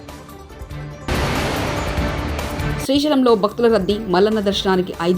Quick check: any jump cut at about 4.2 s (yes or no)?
no